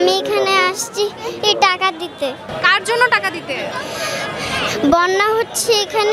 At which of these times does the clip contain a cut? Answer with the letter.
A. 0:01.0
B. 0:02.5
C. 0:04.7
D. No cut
B